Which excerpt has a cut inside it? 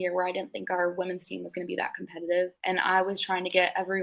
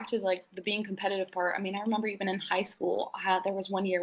first; 1 cut; at 2.6 s

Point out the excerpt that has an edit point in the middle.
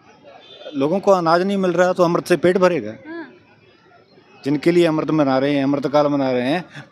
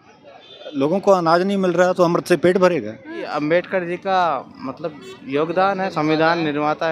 second; 1 cut; at 3.3 s

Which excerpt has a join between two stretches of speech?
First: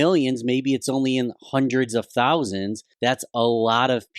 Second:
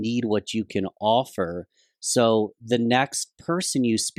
first; 1 cut; at 2.8 s

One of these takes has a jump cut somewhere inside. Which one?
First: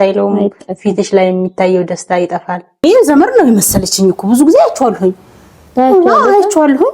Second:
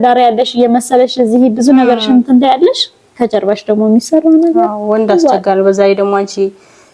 first; 1 cut; at 2.8 s

